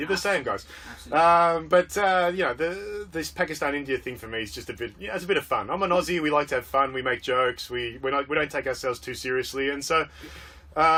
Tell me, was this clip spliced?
no; 0 cuts

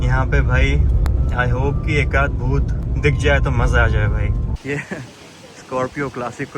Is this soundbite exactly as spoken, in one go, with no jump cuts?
no; 2 cuts; at 1.1 s, 4.5 s

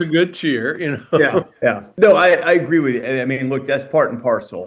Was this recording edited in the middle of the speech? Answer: yes; 1 cut; at 1.9 s

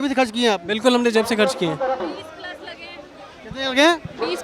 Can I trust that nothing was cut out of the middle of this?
no; 1 cut; at 2.0 s

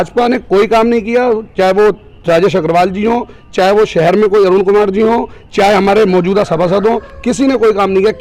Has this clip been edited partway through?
no; 0 cuts

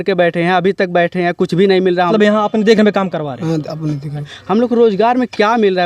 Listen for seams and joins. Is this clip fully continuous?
no; 2 cuts; at 2.1 s, 4.3 s

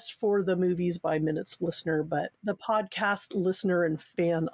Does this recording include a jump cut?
no; 0 cuts

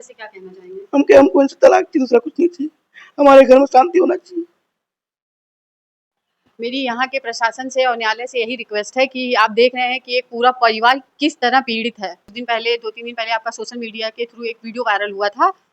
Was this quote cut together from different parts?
yes; 1 cut; at 12.3 s

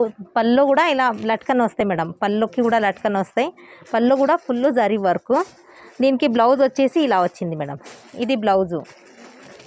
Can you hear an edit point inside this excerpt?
no; 0 cuts

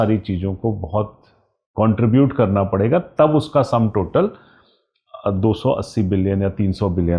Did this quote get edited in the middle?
no; 0 cuts

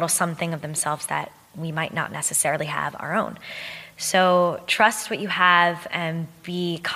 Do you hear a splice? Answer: no; 0 cuts

